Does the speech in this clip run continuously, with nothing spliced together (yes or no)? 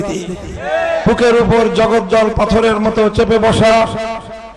no